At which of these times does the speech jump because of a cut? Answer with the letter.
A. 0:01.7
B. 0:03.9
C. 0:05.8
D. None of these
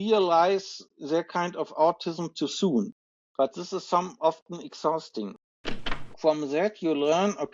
C